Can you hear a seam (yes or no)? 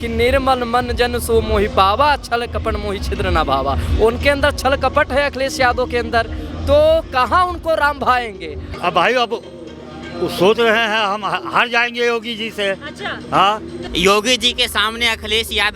yes